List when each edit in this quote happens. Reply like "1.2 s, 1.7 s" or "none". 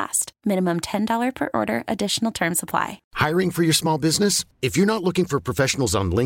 3.0 s